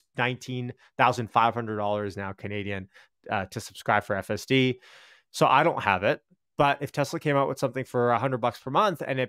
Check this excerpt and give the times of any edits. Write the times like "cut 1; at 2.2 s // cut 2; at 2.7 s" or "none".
none